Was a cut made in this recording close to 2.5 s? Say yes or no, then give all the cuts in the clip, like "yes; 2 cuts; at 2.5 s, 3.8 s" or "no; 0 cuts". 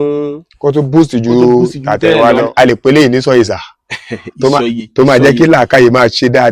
yes; 1 cut; at 2.5 s